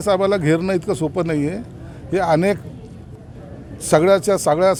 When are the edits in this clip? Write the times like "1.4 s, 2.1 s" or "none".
none